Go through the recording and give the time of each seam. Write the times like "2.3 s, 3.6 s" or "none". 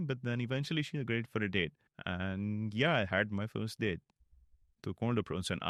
none